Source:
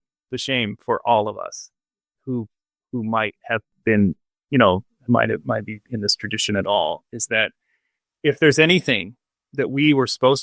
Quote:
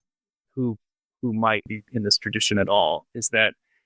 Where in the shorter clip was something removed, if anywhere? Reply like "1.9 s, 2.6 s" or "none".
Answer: 1.7 s